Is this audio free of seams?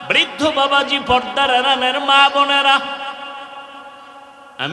yes; 0 cuts

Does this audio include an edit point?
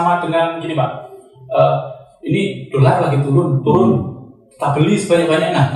no; 0 cuts

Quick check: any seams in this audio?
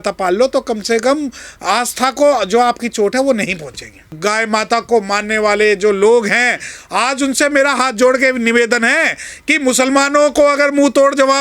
yes; 1 cut; at 4.2 s

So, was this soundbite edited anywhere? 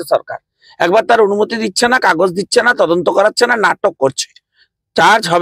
no; 0 cuts

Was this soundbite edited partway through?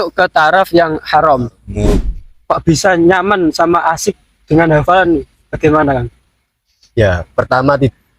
yes; 1 cut; at 2.1 s

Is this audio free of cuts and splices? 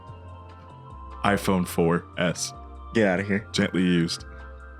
no; 1 cut; at 3.5 s

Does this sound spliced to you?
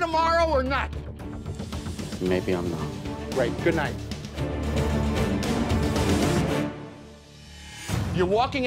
no; 0 cuts

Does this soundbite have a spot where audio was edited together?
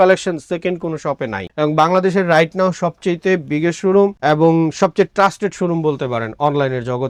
no; 0 cuts

